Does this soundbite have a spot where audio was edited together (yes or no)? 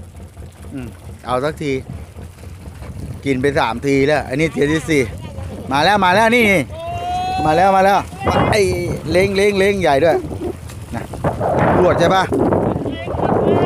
no